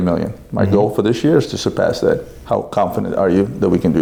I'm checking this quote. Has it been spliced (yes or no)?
no